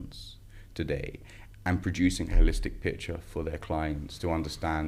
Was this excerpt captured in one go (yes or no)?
yes